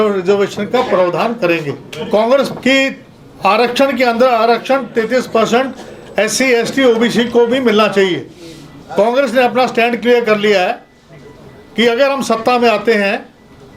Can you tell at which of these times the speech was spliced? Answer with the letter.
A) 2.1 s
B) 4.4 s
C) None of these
A